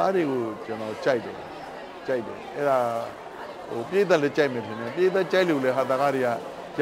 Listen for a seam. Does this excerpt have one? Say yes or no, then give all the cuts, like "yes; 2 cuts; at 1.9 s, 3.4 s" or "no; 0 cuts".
no; 0 cuts